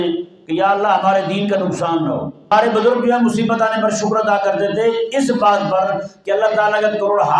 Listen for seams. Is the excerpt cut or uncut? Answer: cut